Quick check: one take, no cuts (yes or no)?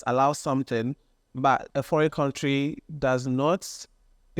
no